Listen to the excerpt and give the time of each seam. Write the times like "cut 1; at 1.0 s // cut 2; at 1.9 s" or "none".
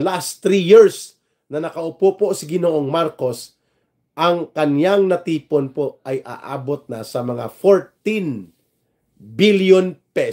none